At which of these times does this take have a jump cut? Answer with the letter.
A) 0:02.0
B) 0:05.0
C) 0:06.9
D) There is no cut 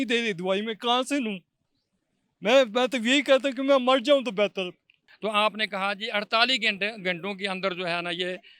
B